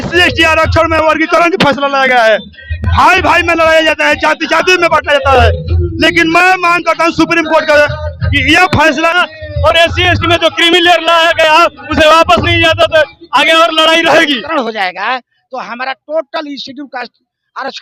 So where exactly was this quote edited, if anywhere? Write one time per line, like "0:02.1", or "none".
0:09.1
0:14.4

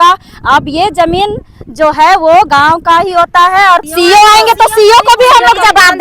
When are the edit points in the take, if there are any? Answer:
0:03.9

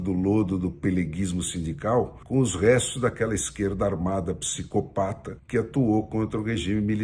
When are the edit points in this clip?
0:02.2
0:05.3

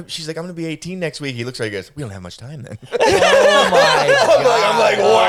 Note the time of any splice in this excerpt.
none

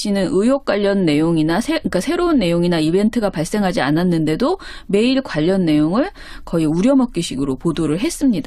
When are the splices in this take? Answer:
none

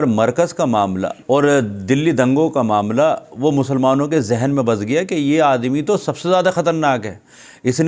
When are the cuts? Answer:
0:01.2

